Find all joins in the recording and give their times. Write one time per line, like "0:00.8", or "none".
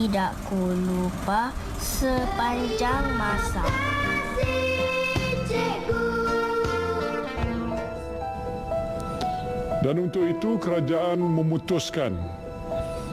0:07.8

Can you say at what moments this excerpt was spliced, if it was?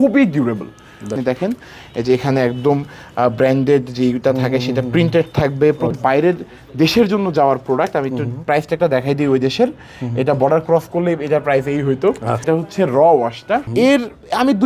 0:01.2
0:06.0
0:12.4
0:13.7

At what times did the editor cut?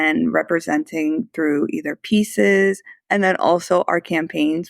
0:02.9

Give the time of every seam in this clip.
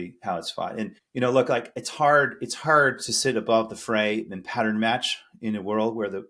0:01.0

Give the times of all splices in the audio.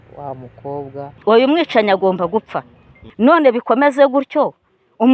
0:01.1

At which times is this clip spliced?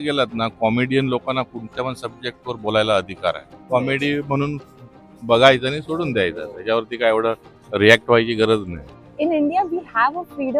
0:03.5
0:09.0

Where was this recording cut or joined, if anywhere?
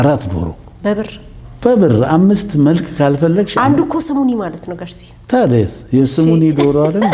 none

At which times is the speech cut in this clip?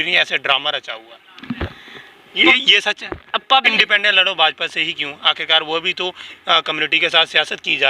0:03.7

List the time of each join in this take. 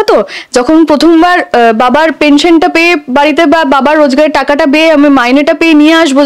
none

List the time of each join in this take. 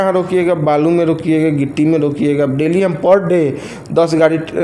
none

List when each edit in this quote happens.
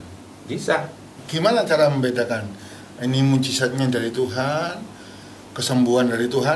0:01.2

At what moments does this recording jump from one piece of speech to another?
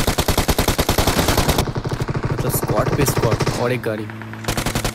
0:01.6

